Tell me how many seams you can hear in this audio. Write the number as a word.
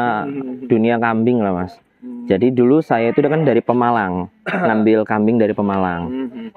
zero